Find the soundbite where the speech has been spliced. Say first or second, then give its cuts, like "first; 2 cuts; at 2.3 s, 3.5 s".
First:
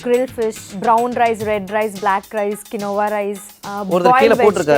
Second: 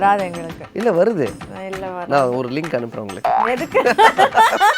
second; 1 cut; at 3.4 s